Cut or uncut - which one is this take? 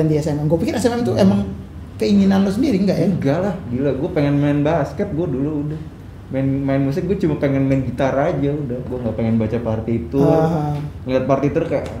uncut